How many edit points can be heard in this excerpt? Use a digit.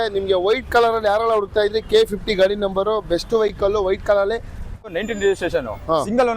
1